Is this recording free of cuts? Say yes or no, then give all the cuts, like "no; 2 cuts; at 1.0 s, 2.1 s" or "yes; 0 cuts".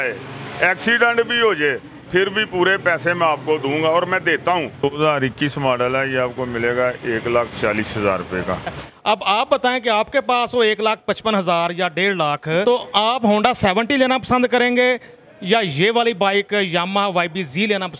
no; 3 cuts; at 4.9 s, 8.9 s, 12.6 s